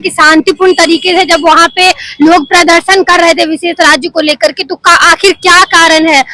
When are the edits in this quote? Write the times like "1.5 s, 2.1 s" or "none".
none